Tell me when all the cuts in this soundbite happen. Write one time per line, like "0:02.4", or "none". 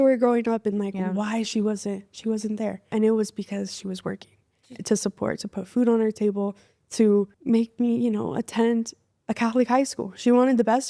0:02.9
0:07.4